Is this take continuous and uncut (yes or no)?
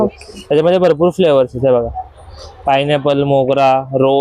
yes